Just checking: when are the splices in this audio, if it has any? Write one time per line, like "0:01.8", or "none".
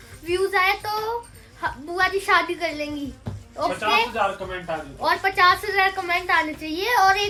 none